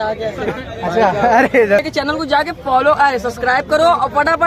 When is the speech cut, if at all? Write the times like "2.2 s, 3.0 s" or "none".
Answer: 1.8 s